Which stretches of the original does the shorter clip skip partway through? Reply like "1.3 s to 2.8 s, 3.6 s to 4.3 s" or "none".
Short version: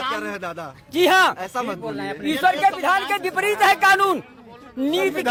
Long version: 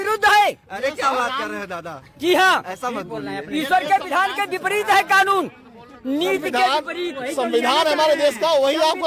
none